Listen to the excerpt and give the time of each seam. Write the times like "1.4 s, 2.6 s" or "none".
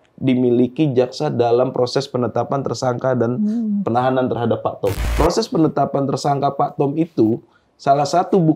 4.9 s